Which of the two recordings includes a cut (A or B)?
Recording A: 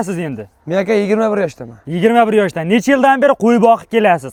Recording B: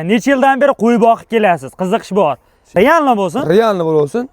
B